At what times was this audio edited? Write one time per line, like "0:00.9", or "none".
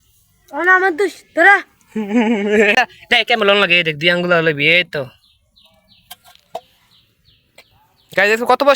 0:02.7